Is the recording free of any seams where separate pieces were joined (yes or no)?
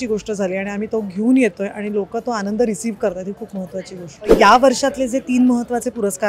no